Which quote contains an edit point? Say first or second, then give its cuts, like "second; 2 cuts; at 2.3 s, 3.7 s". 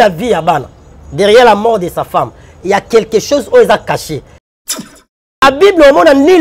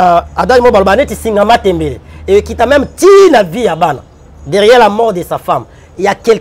first; 1 cut; at 4.7 s